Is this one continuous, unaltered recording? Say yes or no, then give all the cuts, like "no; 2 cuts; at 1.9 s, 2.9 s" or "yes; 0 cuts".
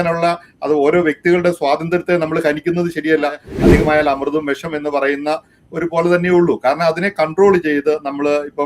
no; 1 cut; at 3.5 s